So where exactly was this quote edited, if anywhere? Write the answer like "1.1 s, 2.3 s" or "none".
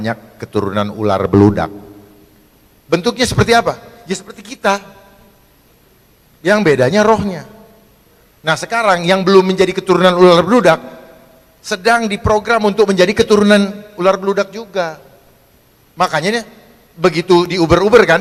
none